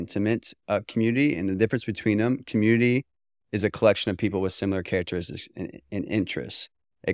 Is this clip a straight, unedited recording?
yes; 0 cuts

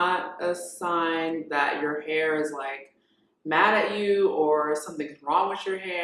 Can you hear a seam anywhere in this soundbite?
no; 0 cuts

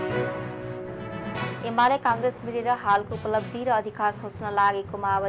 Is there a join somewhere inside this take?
no; 0 cuts

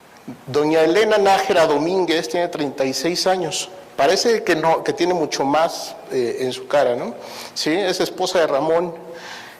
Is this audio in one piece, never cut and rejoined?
no; 1 cut; at 8.4 s

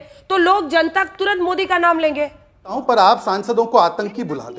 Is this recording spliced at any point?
yes; 1 cut; at 2.7 s

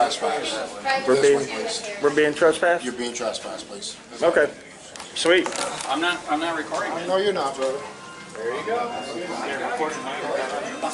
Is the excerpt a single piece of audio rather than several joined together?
yes; 0 cuts

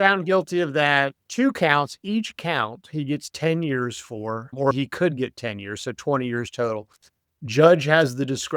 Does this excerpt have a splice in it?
yes; 1 cut; at 1.2 s

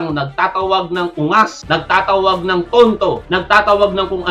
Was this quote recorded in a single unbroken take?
no; 2 cuts; at 1.6 s, 3.2 s

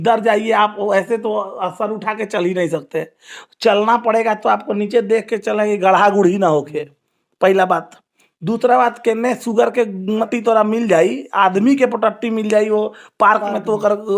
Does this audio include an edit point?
yes; 1 cut; at 10.3 s

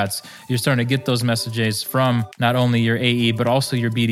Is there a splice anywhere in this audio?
yes; 1 cut; at 2.3 s

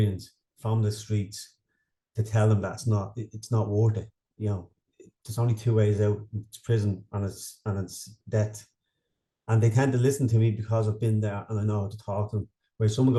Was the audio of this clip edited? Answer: no; 0 cuts

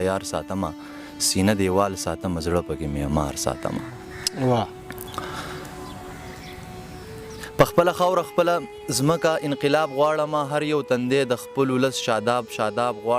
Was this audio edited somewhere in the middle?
yes; 1 cut; at 7.5 s

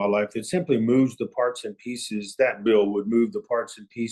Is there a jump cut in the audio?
no; 0 cuts

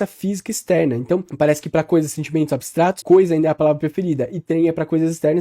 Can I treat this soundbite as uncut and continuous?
no; 2 cuts; at 1.3 s, 3.0 s

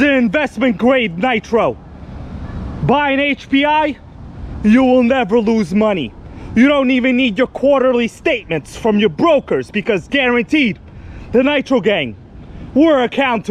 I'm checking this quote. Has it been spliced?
no; 0 cuts

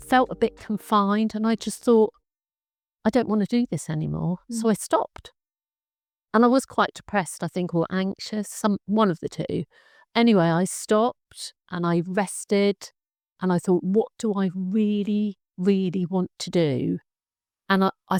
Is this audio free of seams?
yes; 0 cuts

